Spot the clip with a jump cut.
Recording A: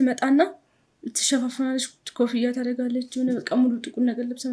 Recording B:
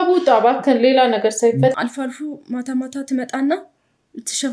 B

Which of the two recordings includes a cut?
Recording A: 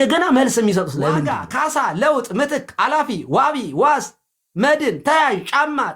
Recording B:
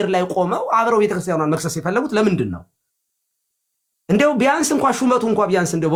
A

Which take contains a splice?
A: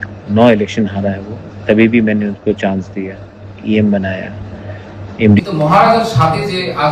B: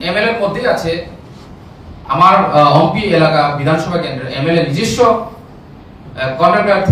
A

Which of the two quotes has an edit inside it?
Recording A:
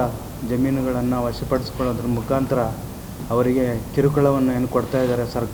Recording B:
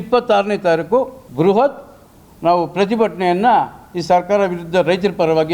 B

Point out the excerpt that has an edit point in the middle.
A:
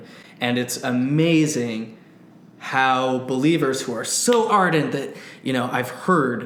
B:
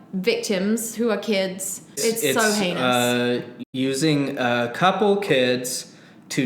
B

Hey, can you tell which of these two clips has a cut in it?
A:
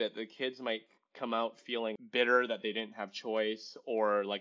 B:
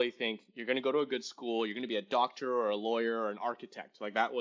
A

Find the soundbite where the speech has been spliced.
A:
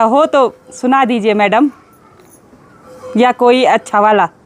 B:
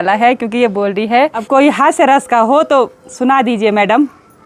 B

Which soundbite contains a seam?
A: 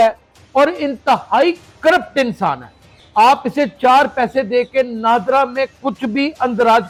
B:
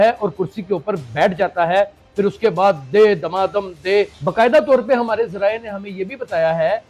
B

